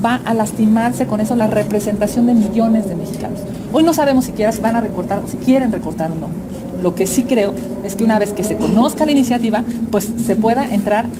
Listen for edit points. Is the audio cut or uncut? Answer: uncut